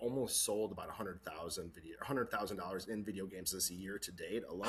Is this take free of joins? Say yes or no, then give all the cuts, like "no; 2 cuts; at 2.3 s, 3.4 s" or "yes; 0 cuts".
yes; 0 cuts